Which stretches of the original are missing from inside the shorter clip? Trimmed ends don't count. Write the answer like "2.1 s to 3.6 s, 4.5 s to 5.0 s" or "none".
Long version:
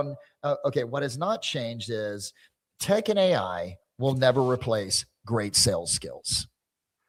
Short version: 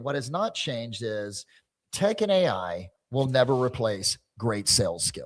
none

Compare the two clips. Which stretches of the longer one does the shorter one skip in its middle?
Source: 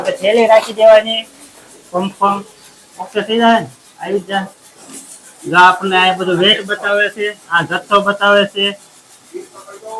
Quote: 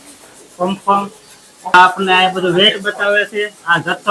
3.1 s to 5.6 s

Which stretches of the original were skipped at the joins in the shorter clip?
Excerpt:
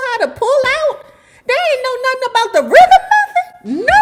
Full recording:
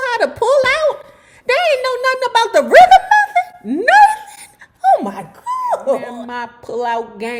none

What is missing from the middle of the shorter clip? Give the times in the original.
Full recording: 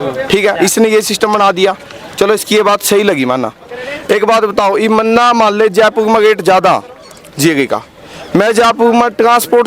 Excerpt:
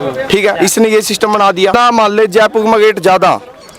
1.7 s to 5.2 s

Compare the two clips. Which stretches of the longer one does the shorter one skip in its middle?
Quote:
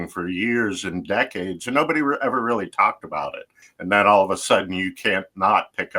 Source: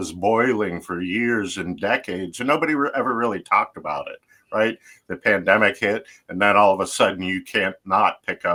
4.4 s to 6.1 s

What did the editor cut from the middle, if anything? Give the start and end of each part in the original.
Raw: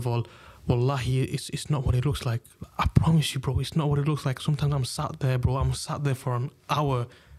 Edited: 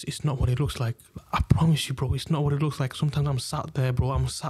none

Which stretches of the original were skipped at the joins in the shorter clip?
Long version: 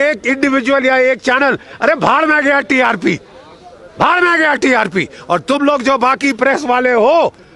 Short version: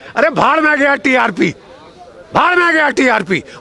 none

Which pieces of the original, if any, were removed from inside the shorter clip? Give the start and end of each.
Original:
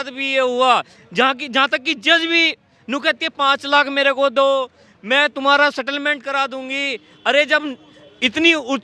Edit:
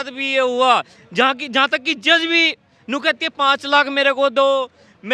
none

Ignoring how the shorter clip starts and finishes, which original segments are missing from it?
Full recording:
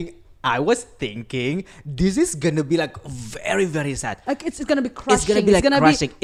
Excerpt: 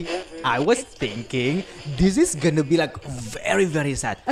none

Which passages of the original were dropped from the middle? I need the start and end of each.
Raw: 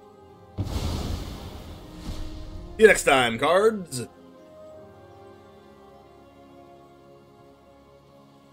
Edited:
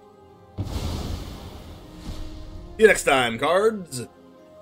none

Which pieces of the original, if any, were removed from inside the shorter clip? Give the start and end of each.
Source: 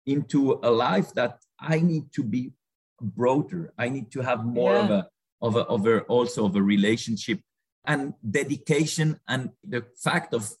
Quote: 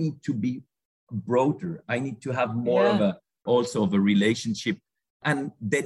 5.3 s to 6.0 s

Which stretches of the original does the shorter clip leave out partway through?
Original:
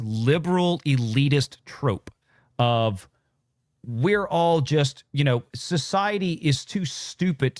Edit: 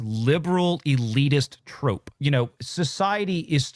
2.1 s to 5.0 s

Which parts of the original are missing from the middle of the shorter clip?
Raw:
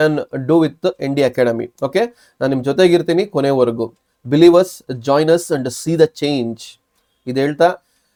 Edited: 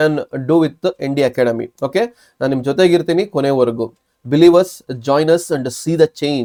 none

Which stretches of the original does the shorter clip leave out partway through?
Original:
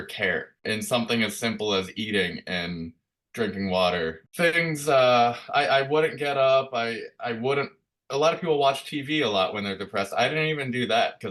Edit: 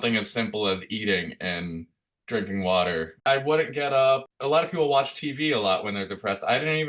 4.3 s to 5.7 s, 6.7 s to 8.0 s

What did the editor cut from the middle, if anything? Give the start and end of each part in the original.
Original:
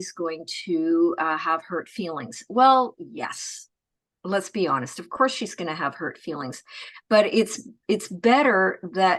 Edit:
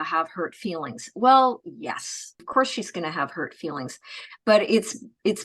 3.7 s to 5.0 s

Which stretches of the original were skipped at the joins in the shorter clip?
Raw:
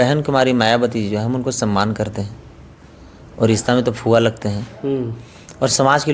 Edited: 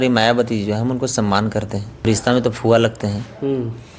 2.5 s to 3.5 s

